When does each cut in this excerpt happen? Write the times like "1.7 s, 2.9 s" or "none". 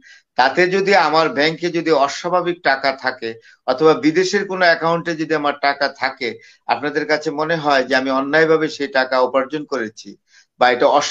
none